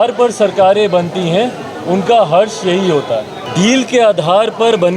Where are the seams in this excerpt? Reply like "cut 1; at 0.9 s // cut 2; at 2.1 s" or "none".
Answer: cut 1; at 3.4 s